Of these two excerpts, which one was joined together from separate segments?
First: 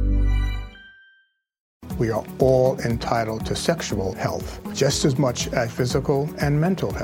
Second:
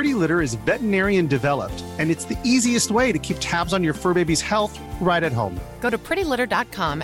first; 1 cut; at 1.8 s

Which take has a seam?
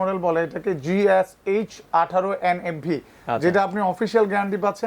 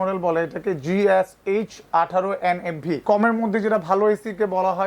second; 1 cut; at 3.0 s

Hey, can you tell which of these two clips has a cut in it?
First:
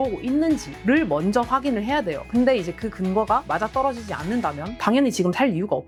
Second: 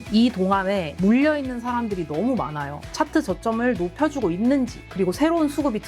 second; 1 cut; at 2.8 s

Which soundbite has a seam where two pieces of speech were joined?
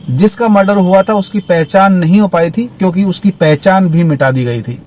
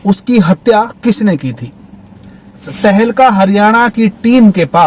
second; 1 cut; at 2.7 s

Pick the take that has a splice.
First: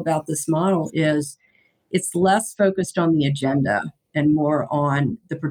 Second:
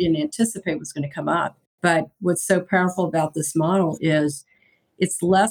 second; 1 cut; at 1.6 s

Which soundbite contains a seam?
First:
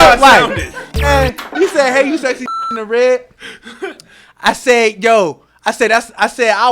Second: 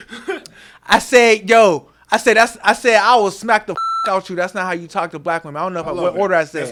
first; 1 cut; at 1.1 s

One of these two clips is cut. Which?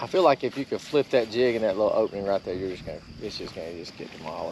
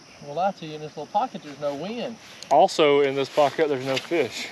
second; 1 cut; at 2.3 s

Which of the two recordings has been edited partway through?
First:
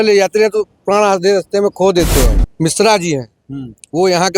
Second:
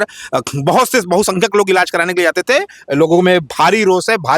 first; 1 cut; at 2.4 s

